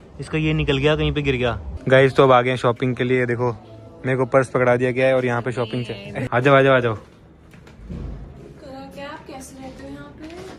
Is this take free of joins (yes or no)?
no